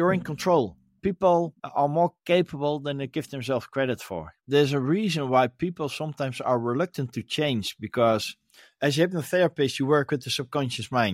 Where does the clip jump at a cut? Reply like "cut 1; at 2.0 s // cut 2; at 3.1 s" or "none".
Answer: cut 1; at 1.0 s // cut 2; at 4.4 s